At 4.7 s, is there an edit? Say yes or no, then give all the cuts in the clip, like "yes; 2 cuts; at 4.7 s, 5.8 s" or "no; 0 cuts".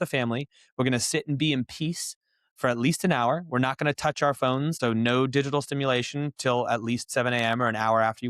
yes; 1 cut; at 4.7 s